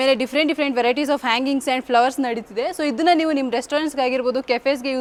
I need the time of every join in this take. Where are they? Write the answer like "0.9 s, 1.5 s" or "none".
none